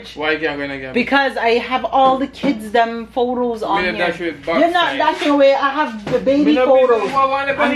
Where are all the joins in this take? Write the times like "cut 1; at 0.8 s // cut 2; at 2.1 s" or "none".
none